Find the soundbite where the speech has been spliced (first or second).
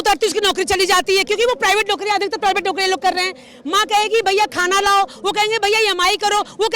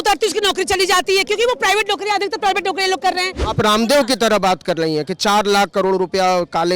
second